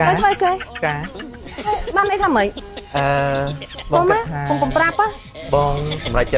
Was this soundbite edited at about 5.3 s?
yes; 1 cut; at 5.3 s

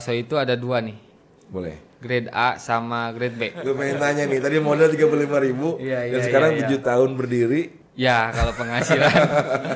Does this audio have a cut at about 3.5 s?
yes; 1 cut; at 3.5 s

